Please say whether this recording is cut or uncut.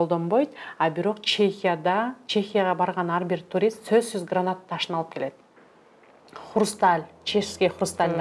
uncut